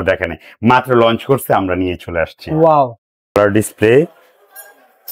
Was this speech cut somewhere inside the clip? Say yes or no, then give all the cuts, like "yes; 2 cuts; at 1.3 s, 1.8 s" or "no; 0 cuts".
yes; 1 cut; at 3.3 s